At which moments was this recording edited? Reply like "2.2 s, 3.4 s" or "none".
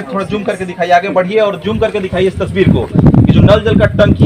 none